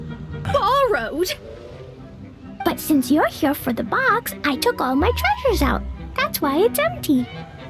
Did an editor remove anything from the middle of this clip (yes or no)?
no